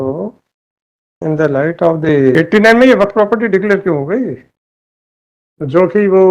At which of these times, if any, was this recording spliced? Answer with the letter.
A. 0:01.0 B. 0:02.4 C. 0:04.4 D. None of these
B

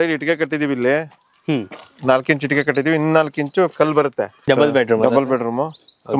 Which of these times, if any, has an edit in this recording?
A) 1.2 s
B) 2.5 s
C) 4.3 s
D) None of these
C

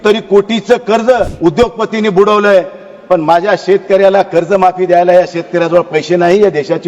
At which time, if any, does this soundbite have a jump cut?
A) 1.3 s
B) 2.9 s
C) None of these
A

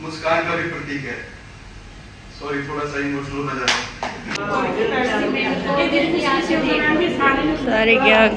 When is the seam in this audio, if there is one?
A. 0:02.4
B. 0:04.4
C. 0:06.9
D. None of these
B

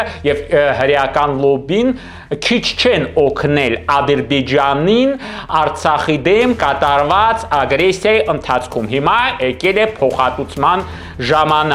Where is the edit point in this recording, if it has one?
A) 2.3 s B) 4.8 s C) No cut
C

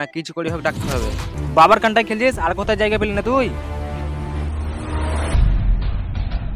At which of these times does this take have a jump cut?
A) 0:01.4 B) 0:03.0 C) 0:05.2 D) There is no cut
A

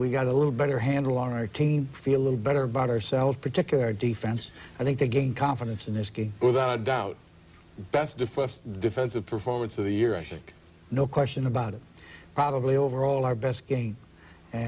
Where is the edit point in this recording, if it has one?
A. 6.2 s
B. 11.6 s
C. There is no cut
B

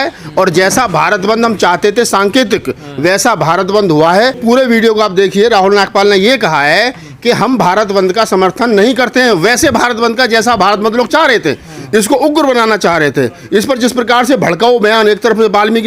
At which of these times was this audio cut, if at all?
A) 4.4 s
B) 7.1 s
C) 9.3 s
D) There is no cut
A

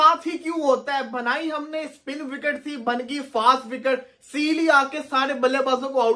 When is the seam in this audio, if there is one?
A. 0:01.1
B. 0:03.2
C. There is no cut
C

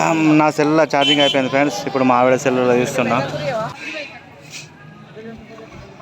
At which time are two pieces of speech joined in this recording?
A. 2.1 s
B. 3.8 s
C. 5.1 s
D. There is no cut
B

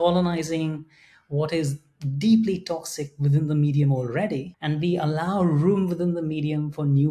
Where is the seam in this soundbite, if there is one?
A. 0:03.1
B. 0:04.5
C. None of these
B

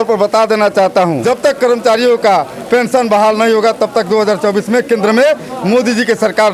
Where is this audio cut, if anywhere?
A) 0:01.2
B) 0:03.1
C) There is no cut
A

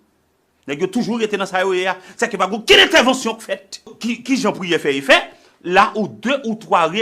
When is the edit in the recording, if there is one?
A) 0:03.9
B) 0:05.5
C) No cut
A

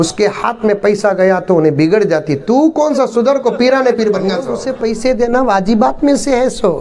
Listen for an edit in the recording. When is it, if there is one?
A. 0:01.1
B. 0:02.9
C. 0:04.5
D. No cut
C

